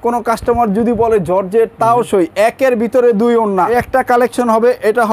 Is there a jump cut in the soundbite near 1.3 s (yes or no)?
no